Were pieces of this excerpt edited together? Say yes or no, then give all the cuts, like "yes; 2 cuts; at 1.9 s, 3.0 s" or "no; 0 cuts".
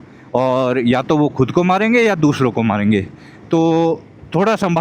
no; 0 cuts